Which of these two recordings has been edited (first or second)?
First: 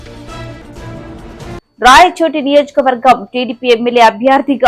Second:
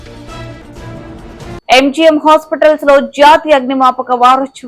second